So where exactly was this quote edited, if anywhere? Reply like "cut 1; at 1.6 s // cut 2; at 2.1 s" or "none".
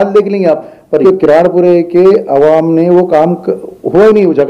cut 1; at 1.0 s